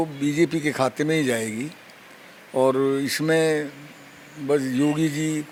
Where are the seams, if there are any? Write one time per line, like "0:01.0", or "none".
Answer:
none